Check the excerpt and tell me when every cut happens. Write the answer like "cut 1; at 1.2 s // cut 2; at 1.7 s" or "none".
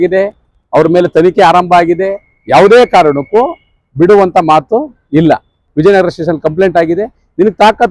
cut 1; at 5.6 s